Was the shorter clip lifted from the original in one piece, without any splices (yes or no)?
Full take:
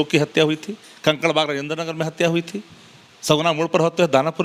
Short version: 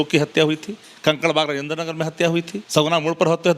no